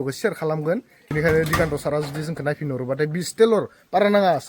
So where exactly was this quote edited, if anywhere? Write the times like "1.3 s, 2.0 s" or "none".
1.1 s

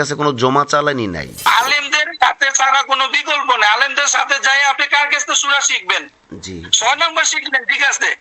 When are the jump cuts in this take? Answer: 1.5 s

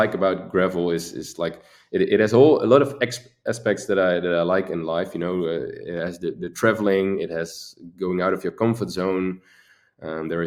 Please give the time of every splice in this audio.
none

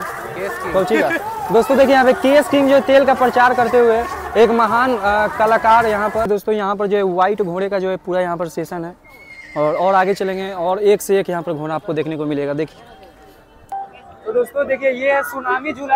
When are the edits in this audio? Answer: 6.2 s, 13.6 s

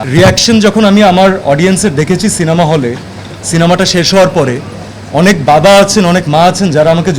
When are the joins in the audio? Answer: none

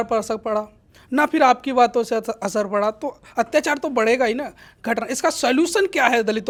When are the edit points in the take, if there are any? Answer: none

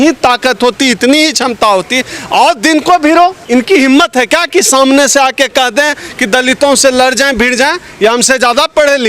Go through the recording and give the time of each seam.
3.4 s

